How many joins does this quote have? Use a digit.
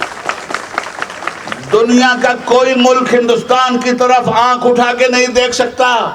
0